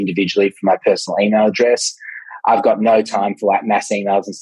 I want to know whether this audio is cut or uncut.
uncut